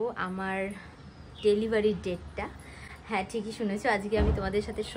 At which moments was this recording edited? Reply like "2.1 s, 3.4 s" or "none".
none